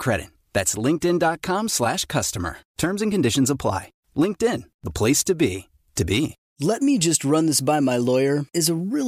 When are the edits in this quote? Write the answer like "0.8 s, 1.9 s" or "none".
6.4 s